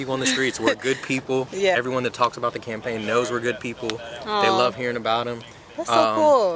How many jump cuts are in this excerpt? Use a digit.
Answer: 1